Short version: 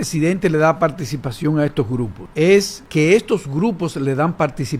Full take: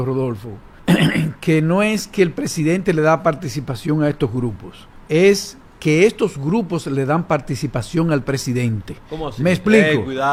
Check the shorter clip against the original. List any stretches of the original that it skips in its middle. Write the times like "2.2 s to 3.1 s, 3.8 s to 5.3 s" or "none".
4.6 s to 4.9 s, 5.5 s to 5.7 s

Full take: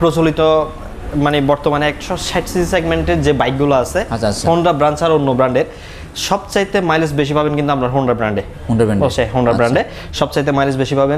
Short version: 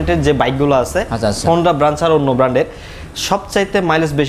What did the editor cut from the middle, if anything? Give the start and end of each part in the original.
none

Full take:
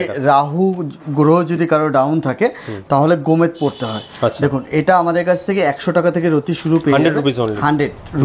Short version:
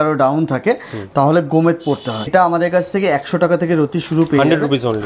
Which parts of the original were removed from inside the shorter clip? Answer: 4.0 s to 4.8 s

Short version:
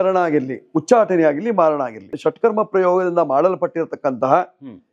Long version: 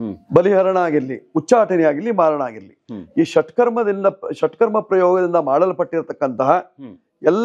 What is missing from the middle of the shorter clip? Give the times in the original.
2.7 s to 4.3 s

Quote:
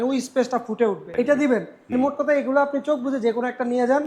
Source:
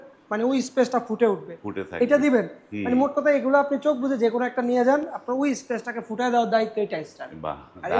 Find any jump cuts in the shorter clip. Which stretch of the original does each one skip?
1.5 s to 1.9 s, 2.6 s to 2.7 s

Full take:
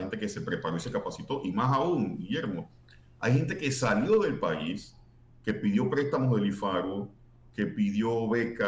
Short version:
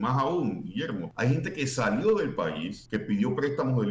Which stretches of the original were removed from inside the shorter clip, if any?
2.6 s to 3.1 s, 4.8 s to 5.3 s

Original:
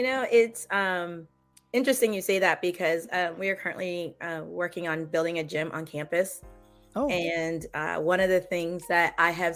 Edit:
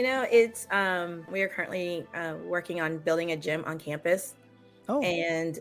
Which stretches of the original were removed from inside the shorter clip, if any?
1.3 s to 3.4 s

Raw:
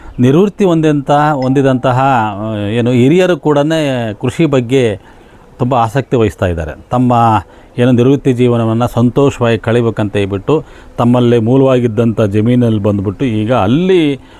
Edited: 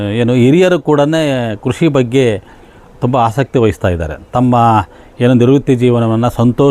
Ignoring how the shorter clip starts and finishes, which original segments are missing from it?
none

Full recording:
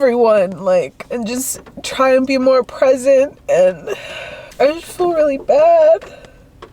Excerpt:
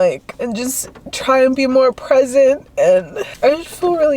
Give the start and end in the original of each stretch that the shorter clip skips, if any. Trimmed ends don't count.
3.9 s to 4.4 s

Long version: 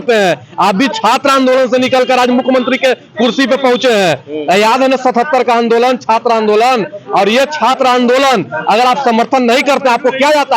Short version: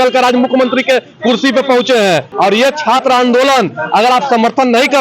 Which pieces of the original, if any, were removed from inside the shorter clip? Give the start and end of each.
4.2 s to 7.0 s

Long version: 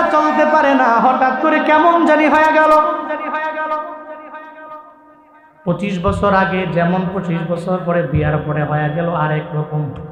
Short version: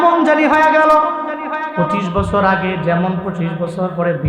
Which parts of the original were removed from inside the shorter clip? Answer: 3.5 s to 5.6 s

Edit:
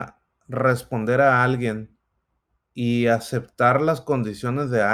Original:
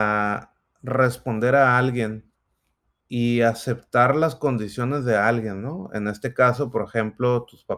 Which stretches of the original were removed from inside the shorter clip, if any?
none

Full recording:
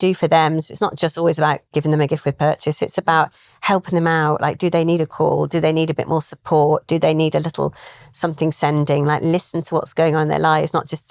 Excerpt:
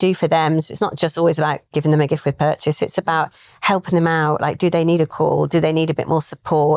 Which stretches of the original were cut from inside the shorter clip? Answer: none

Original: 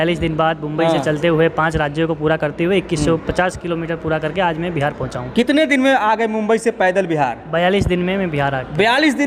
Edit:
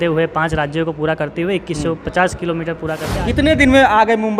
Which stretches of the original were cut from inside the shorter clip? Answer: 4.4 s to 5.3 s

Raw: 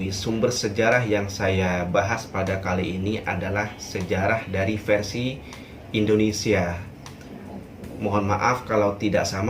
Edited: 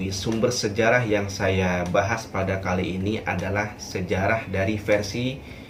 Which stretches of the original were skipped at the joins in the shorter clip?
none

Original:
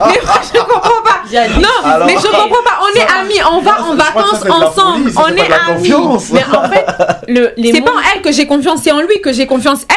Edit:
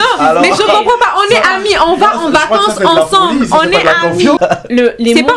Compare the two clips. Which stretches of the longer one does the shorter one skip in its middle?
6.0 s to 7.0 s

